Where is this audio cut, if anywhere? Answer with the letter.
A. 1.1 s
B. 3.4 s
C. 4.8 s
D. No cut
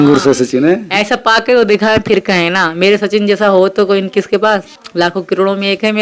C